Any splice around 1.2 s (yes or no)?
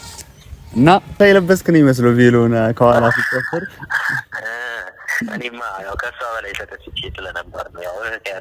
yes